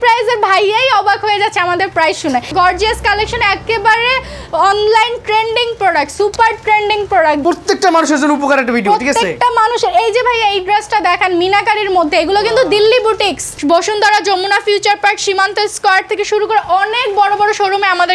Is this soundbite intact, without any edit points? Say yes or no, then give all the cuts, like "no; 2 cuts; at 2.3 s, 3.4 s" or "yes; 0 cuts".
no; 3 cuts; at 2.5 s, 7.4 s, 13.5 s